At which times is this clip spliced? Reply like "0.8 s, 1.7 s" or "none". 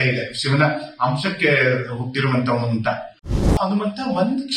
3.5 s